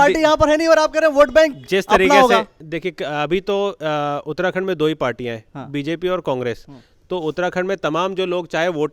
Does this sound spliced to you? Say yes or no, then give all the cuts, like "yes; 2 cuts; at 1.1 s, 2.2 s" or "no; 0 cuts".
yes; 1 cut; at 2.6 s